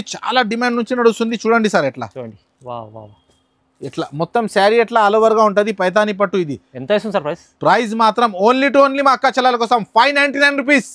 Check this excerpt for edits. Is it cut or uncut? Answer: uncut